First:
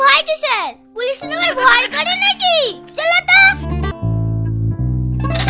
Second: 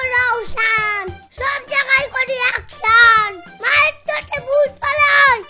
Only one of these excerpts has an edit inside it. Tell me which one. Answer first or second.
first